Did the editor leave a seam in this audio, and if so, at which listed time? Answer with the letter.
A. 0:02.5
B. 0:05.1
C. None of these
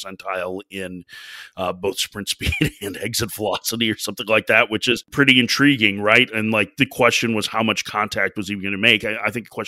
B